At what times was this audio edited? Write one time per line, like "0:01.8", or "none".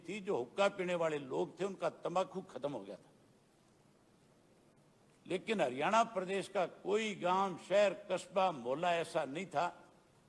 none

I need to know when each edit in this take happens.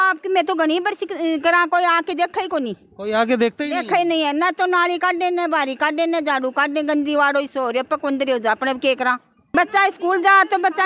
none

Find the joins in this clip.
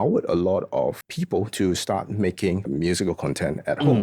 0:01.1
0:02.7

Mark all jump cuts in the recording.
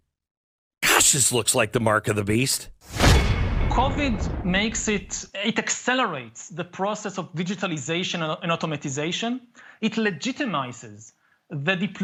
none

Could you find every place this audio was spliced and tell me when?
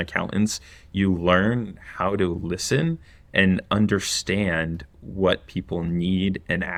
none

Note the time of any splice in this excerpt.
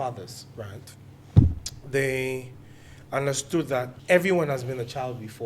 0:04.0

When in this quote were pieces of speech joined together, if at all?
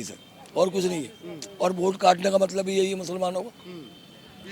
none

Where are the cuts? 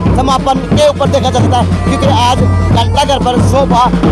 none

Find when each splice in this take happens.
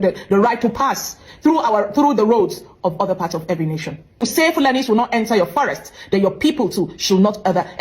0:04.2

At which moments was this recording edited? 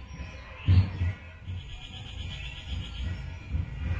0:01.4

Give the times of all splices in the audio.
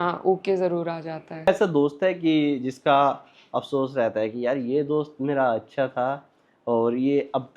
0:01.5

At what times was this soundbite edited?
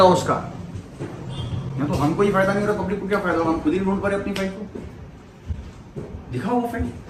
none

